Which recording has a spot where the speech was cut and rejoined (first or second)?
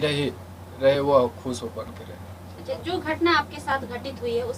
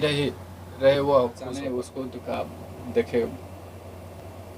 second